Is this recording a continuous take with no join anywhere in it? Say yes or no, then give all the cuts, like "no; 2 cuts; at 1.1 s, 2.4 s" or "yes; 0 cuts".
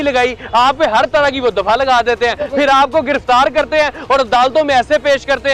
yes; 0 cuts